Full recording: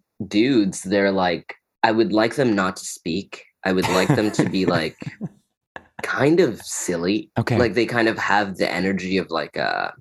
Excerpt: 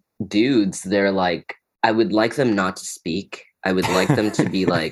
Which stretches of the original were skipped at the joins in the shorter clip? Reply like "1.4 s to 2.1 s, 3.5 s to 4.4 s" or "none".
none